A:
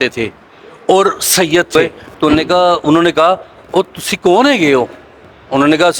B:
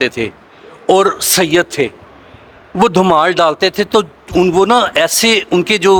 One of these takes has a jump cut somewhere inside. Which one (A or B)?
A